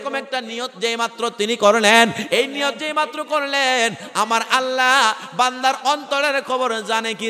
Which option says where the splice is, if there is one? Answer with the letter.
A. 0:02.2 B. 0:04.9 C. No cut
C